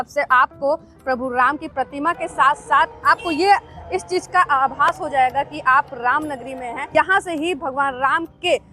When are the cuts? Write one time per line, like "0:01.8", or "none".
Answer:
0:06.8